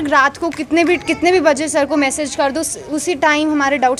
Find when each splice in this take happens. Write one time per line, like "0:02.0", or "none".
none